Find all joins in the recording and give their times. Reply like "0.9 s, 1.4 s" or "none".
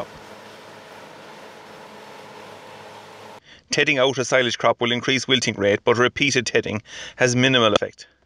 1.5 s